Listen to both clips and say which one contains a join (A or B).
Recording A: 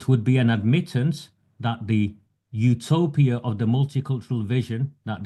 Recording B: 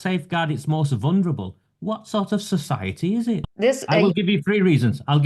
B